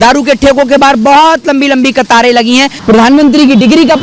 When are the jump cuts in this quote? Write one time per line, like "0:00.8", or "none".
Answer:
0:02.8